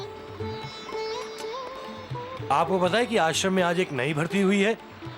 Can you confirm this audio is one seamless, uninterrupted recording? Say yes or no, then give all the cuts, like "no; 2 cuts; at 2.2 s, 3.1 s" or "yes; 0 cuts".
yes; 0 cuts